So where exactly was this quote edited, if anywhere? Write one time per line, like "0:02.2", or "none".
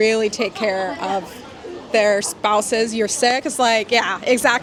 none

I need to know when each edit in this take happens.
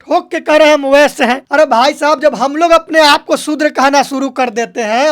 0:01.4

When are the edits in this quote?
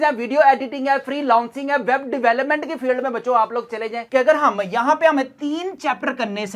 0:04.1

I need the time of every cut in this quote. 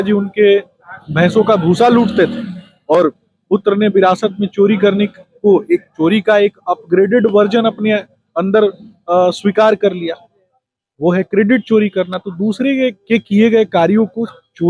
none

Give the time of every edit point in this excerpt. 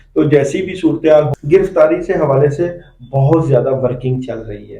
0:01.3

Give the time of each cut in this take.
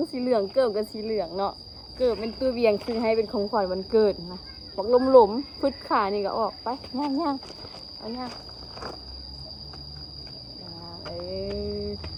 none

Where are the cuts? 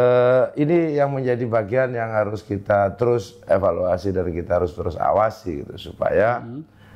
none

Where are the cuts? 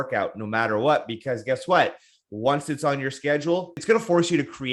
0:03.8

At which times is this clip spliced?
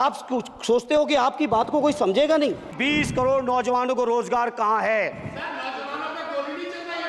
0:02.8

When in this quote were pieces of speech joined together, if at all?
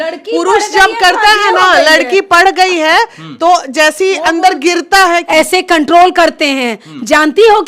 0:05.2

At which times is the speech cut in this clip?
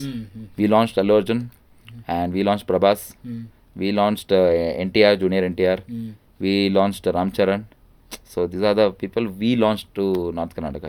none

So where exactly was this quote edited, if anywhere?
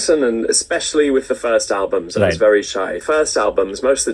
0:03.0

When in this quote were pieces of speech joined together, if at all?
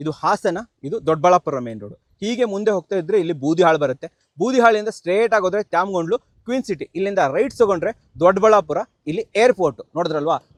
none

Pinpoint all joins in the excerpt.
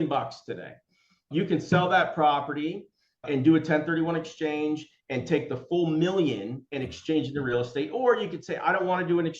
0:03.2

